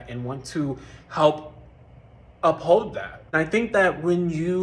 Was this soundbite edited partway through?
yes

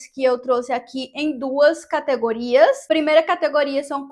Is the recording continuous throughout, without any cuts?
no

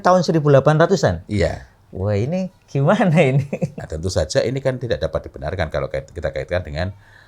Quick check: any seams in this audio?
yes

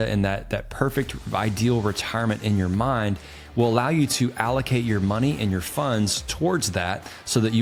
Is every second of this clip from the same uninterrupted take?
yes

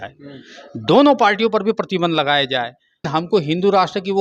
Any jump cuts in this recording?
yes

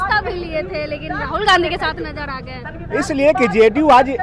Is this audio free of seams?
yes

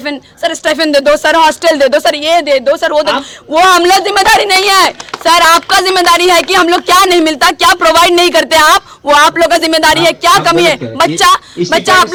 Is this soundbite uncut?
yes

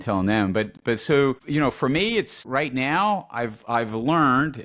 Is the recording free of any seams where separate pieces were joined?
no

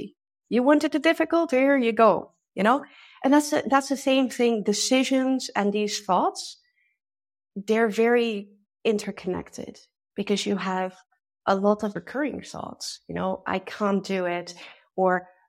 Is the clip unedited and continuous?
no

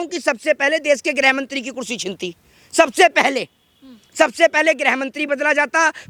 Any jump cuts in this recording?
no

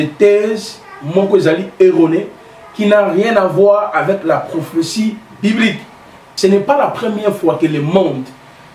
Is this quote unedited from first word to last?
no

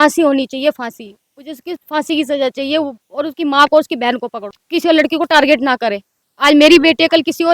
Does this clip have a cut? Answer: yes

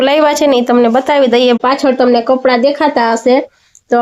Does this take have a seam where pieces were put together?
yes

